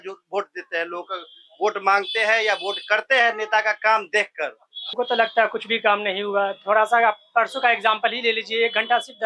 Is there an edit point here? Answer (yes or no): yes